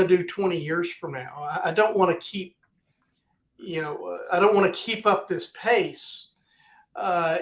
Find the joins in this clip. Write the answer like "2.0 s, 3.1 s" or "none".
none